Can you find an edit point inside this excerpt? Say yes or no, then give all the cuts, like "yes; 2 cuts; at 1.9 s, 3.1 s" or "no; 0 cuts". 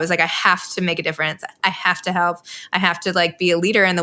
no; 0 cuts